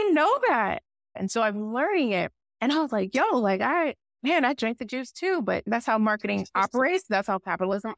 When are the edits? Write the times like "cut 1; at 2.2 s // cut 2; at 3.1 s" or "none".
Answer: cut 1; at 1.1 s // cut 2; at 2.4 s // cut 3; at 4.1 s // cut 4; at 5.6 s